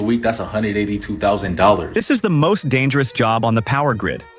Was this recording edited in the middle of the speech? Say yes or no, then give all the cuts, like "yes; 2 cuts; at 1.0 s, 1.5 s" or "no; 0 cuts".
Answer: yes; 1 cut; at 1.9 s